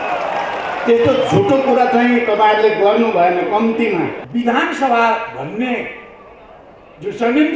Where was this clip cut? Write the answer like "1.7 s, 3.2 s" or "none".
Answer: 4.2 s